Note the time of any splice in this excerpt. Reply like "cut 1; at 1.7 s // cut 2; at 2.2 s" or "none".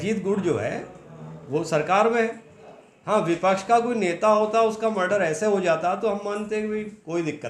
none